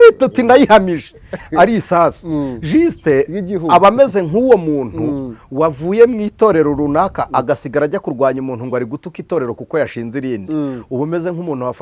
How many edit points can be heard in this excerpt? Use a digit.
0